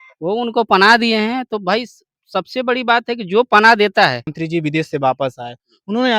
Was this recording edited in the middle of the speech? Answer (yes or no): yes